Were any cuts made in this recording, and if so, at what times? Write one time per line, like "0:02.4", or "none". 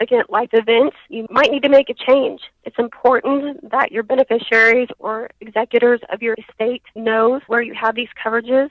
none